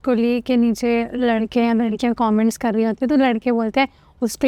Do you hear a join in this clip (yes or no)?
no